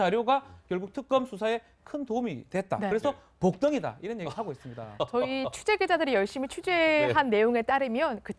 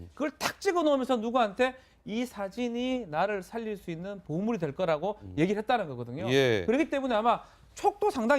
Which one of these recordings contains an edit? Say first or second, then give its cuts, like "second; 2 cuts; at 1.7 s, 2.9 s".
second; 1 cut; at 7.4 s